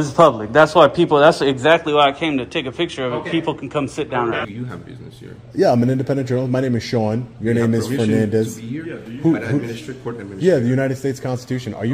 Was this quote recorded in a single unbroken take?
no; 1 cut; at 4.5 s

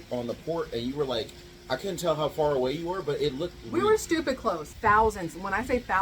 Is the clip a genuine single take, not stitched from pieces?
no; 1 cut; at 4.7 s

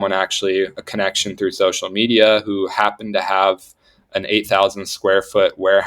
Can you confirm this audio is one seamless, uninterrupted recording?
yes; 0 cuts

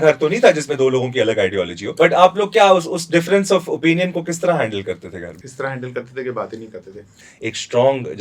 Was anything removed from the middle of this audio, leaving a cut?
yes; 3 cuts; at 1.8 s, 5.4 s, 7.3 s

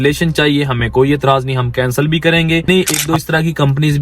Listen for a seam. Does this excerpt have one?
yes; 1 cut; at 2.7 s

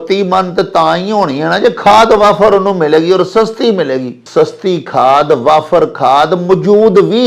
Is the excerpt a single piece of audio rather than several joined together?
no; 1 cut; at 4.2 s

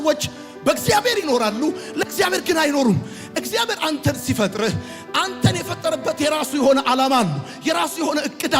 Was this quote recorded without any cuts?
yes; 0 cuts

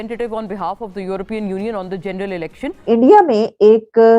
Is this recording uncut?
no; 1 cut; at 2.8 s

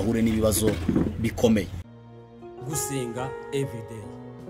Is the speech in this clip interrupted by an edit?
yes; 1 cut; at 1.8 s

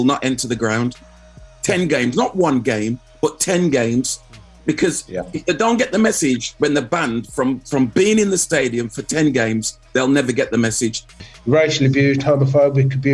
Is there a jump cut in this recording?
yes; 1 cut; at 11.1 s

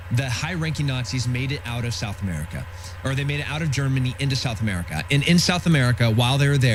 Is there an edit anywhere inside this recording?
no; 0 cuts

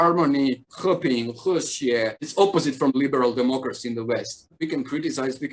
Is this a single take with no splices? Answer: no; 1 cut; at 4.5 s

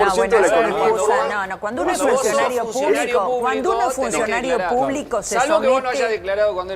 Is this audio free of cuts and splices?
yes; 0 cuts

